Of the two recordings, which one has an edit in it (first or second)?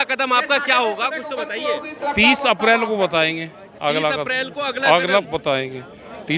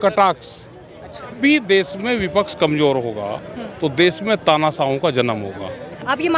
second